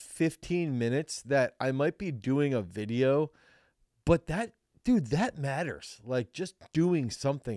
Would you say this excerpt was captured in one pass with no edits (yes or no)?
yes